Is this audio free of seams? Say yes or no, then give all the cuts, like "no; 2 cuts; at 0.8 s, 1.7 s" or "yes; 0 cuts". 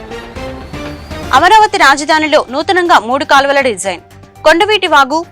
no; 1 cut; at 1.2 s